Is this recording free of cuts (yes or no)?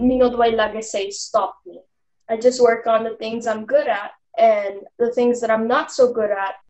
yes